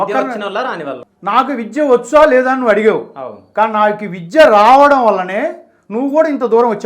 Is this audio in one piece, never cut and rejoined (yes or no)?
no